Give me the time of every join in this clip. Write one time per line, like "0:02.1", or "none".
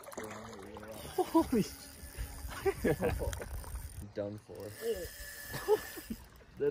0:04.1